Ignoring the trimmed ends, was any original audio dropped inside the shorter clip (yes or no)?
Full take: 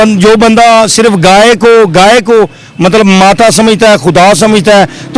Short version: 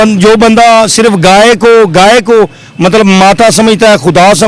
no